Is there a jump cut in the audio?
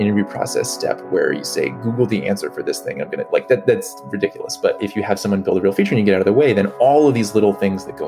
yes; 1 cut; at 4.8 s

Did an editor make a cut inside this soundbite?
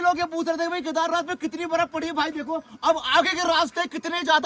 no; 0 cuts

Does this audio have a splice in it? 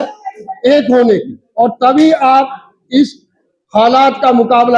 no; 0 cuts

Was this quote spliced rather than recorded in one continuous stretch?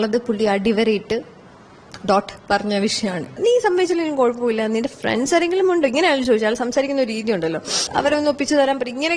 yes; 2 cuts; at 3.4 s, 7.9 s

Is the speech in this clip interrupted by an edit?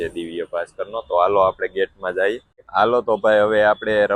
no; 0 cuts

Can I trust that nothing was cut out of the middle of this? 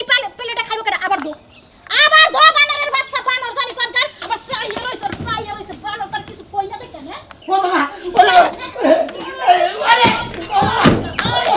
no; 2 cuts; at 4.2 s, 7.4 s

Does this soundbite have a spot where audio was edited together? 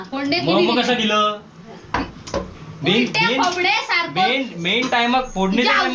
no; 0 cuts

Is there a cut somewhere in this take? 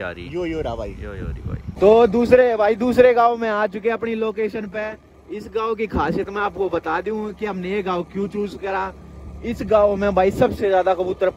yes; 1 cut; at 1.7 s

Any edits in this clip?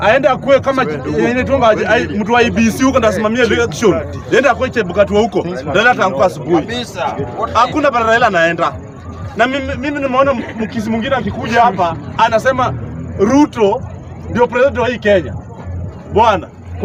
no; 0 cuts

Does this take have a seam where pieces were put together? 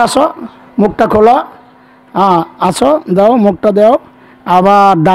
no; 0 cuts

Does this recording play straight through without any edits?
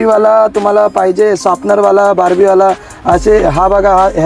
yes; 0 cuts

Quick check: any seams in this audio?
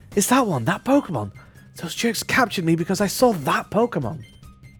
no; 0 cuts

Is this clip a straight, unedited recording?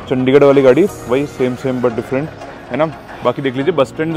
no; 1 cut; at 3.1 s

